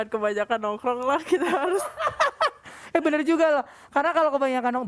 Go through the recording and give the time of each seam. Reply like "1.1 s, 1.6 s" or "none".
none